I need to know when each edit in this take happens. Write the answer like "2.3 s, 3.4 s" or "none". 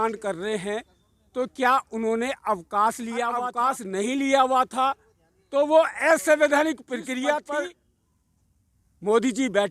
3.5 s, 7.5 s